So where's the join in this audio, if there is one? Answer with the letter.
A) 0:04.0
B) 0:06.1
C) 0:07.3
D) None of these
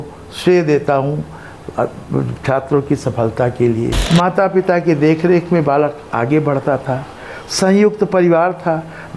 A